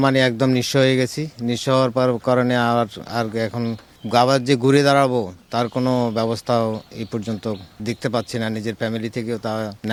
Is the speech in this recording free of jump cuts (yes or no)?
yes